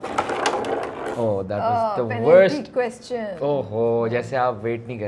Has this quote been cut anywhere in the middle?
no; 0 cuts

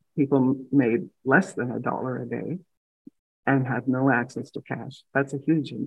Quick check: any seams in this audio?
no; 0 cuts

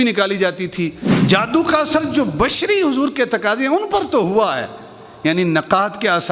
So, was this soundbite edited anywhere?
yes; 1 cut; at 1.1 s

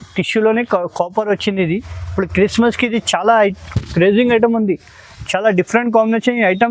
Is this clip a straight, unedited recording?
yes; 0 cuts

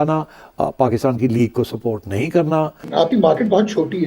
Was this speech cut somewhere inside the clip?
yes; 1 cut; at 2.8 s

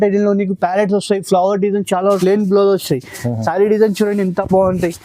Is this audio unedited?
no; 1 cut; at 2.2 s

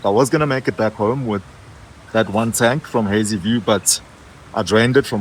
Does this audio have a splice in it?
no; 0 cuts

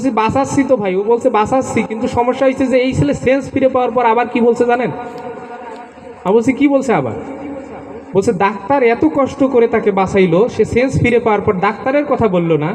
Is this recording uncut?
yes; 0 cuts

